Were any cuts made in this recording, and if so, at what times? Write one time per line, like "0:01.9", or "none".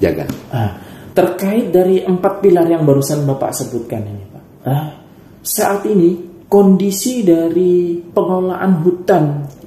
0:08.0